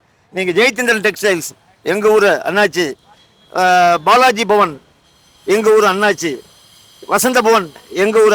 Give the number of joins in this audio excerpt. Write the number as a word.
zero